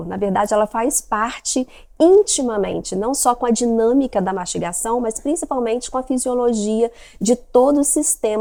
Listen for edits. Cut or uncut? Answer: uncut